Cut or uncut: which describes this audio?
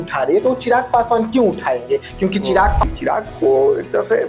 cut